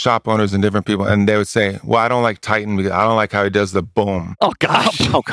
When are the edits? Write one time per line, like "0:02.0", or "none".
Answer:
none